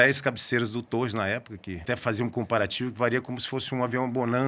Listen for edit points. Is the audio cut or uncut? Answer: cut